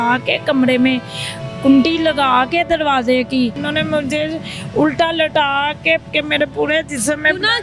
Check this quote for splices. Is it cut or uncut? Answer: cut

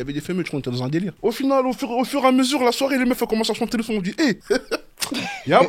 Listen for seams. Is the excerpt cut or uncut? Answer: uncut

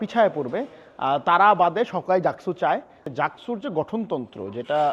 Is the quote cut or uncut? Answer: cut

